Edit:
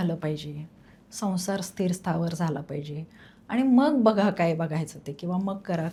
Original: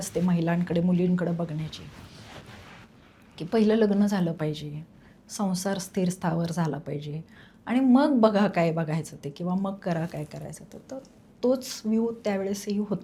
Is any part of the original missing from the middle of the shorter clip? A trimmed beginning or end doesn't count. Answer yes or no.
no